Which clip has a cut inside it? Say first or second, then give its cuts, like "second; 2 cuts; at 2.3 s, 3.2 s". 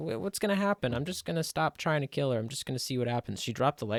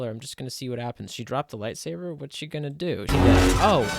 second; 1 cut; at 3.1 s